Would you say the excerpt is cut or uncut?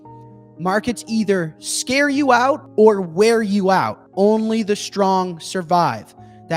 cut